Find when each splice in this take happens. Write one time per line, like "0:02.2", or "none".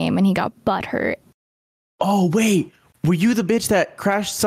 none

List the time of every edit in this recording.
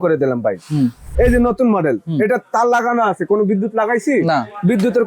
0:01.0

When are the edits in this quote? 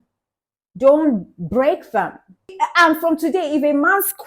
0:02.5

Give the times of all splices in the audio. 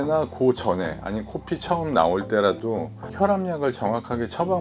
0:03.0

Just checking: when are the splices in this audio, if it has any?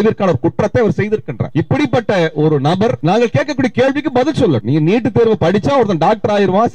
0:01.4
0:03.0
0:04.6

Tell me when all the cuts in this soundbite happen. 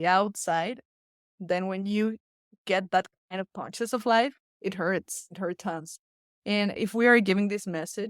0:06.8

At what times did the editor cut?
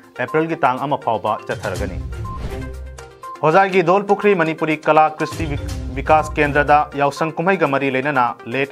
0:01.9

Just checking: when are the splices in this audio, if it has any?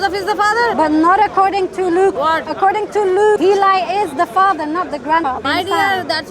0:00.7
0:02.2
0:03.4
0:05.3

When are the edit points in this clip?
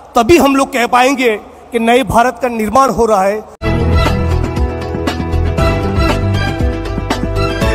0:03.5

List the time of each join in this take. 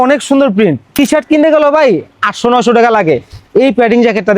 0:01.0

